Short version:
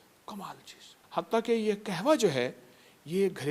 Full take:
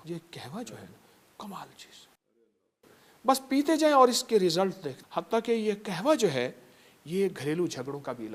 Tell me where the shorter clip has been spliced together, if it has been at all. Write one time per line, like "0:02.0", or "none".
0:00.9